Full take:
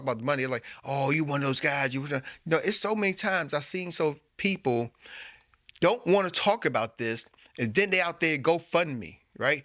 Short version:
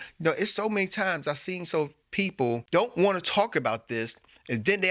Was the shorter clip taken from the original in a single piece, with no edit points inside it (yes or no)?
no